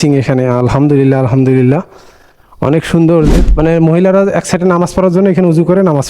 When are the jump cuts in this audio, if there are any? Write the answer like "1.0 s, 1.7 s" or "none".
3.3 s